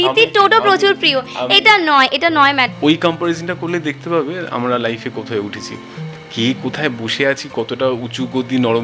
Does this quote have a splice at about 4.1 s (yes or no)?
no